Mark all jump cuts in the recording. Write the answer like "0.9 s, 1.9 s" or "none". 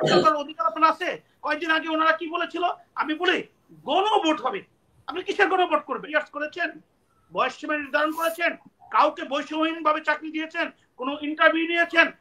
6.0 s